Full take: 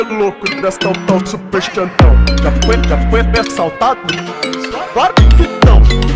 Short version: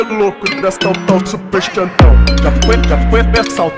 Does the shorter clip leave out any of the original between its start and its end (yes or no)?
no